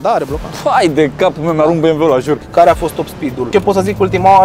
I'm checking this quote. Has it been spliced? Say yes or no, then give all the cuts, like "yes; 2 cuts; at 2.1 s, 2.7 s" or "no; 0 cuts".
yes; 2 cuts; at 2.4 s, 3.3 s